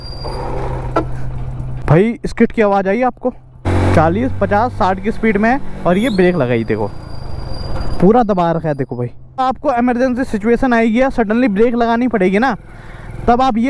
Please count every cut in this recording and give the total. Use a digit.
3